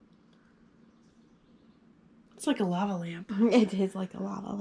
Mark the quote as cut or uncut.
uncut